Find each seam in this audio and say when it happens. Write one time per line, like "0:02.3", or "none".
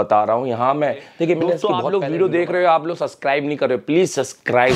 0:01.7